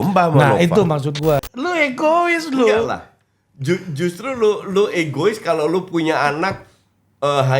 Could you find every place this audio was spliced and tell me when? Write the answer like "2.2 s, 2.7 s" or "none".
1.5 s